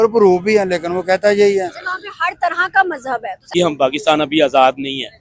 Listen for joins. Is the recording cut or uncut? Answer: cut